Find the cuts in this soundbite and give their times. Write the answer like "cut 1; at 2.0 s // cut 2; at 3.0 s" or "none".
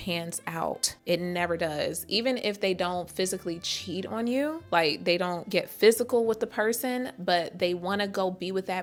none

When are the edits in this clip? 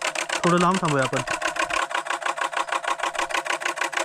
cut 1; at 1.8 s

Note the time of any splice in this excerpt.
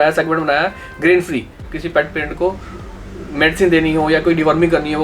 cut 1; at 1.7 s

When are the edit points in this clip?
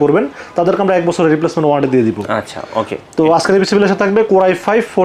none

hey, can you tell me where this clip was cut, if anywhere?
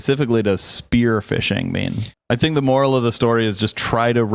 cut 1; at 2.1 s

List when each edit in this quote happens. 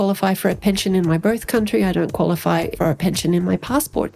cut 1; at 2.7 s

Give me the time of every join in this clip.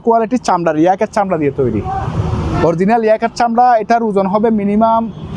none

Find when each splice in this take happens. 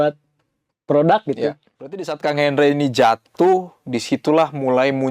cut 1; at 2.1 s

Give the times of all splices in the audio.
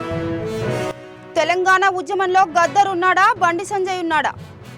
none

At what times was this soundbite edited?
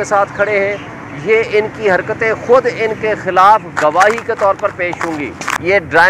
cut 1; at 5.0 s

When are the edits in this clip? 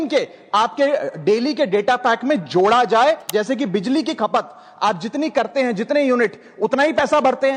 cut 1; at 3.3 s

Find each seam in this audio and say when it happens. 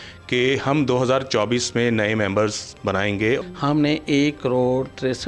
cut 1; at 3.4 s

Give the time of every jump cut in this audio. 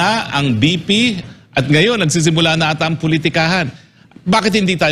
cut 1; at 1.2 s

